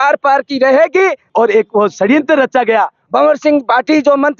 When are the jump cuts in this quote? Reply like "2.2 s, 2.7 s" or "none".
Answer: 1.3 s, 3.0 s